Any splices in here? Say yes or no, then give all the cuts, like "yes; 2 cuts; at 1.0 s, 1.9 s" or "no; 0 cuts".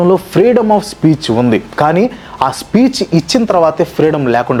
no; 0 cuts